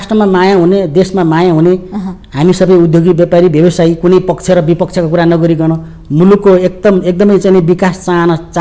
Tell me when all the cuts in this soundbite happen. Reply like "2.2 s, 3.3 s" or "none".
none